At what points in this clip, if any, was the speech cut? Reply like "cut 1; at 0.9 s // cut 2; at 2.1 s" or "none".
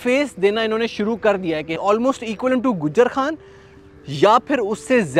cut 1; at 1.8 s